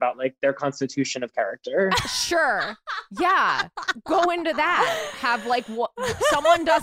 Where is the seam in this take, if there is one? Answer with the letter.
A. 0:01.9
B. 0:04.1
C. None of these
A